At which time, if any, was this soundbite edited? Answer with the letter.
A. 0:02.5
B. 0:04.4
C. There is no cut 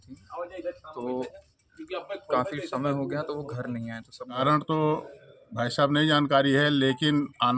B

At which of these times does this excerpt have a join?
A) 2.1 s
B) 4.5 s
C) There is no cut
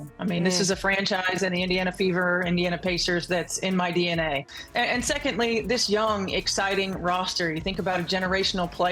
B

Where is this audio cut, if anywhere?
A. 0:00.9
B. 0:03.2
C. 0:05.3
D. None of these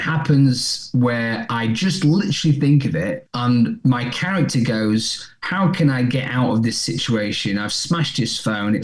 B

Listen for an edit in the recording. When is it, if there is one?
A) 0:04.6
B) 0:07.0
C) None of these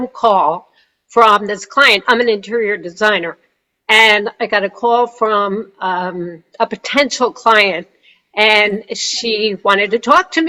C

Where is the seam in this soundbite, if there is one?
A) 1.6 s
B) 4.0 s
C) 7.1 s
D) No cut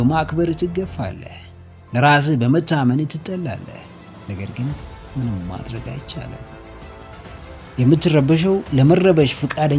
C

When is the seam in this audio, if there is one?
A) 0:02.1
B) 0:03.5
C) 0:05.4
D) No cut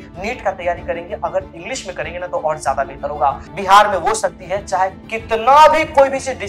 B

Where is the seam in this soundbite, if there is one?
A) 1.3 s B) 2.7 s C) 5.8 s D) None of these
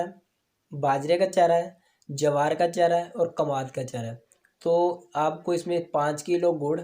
D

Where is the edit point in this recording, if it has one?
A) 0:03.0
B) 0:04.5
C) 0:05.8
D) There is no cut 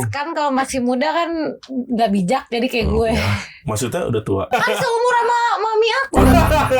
B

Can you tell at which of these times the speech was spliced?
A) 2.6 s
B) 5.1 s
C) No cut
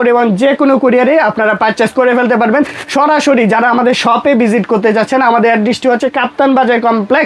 C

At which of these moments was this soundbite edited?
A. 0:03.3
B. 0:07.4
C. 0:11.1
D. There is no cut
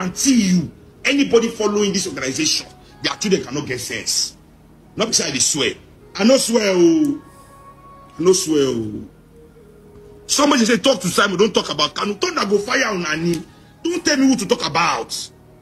D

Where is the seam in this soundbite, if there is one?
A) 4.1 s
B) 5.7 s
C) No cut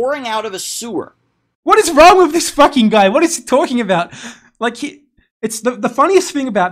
C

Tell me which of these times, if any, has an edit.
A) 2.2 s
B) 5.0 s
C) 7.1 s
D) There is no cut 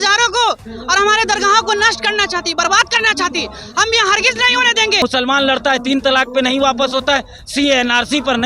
B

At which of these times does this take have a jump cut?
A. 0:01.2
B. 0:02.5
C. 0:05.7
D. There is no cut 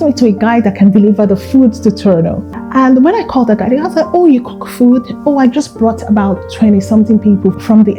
B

